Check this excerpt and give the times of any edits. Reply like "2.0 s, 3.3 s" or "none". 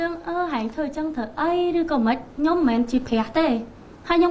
none